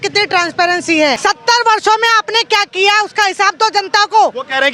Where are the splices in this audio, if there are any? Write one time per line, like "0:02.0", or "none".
0:01.2